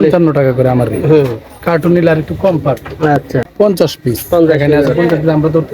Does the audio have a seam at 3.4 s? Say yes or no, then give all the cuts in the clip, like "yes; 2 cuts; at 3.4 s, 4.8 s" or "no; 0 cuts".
yes; 1 cut; at 3.4 s